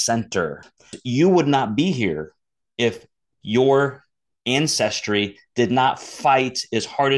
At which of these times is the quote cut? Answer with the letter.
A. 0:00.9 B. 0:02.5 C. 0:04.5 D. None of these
A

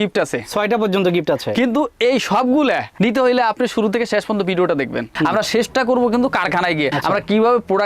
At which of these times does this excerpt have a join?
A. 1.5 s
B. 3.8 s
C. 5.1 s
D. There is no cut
C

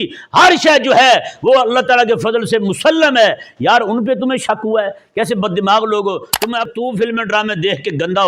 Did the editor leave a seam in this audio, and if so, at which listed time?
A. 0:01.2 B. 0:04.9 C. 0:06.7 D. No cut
C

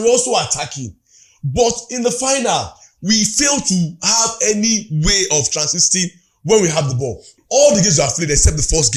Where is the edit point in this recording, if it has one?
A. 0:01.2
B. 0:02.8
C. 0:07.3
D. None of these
C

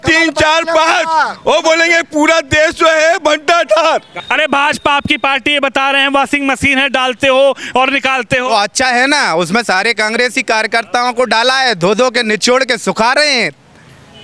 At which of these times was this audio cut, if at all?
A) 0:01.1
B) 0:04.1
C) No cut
B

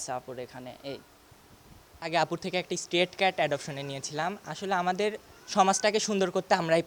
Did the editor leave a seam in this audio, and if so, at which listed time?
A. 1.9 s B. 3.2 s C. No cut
A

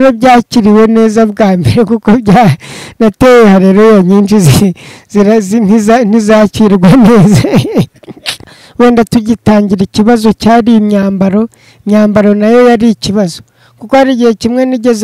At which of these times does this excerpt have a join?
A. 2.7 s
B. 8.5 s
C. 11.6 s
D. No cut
B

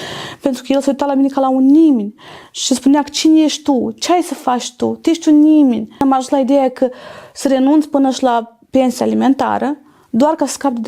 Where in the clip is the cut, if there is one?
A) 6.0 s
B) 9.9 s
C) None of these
A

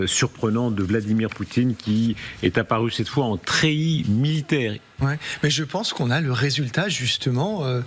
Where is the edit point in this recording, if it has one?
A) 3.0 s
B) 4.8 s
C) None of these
B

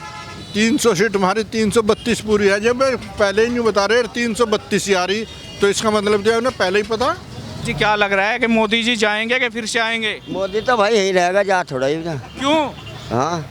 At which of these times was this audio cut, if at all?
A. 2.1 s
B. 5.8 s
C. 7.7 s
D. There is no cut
C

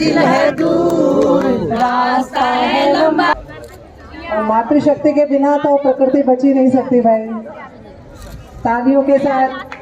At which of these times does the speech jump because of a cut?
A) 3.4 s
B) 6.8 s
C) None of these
A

